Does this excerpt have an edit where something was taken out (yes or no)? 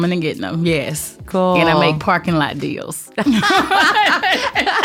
yes